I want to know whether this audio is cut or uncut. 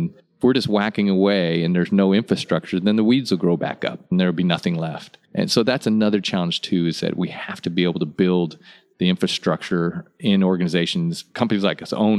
uncut